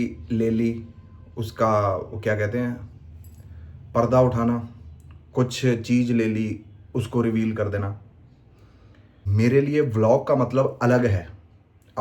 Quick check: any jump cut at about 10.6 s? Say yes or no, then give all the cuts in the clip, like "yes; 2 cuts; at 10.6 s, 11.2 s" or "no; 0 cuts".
no; 1 cut; at 9.3 s